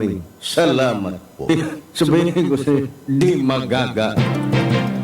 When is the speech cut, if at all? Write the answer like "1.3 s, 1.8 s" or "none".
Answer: 4.1 s